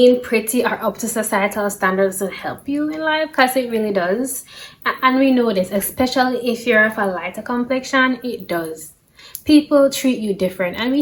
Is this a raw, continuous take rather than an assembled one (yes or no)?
yes